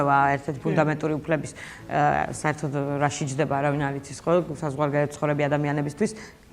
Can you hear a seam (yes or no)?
no